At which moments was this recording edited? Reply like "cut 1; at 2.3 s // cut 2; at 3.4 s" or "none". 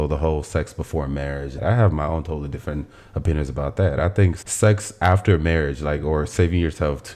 cut 1; at 1.5 s // cut 2; at 4.4 s